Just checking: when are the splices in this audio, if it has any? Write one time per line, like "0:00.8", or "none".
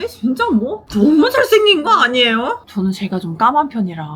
0:02.6